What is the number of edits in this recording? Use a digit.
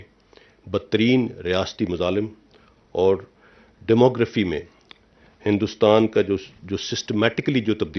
0